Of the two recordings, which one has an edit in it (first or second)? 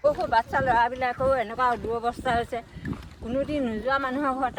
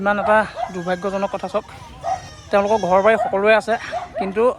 second